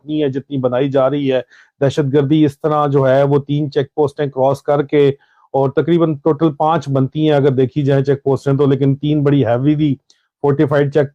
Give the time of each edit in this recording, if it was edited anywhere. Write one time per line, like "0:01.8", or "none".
none